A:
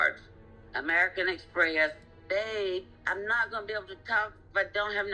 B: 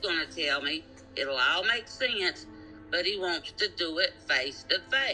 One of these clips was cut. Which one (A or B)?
A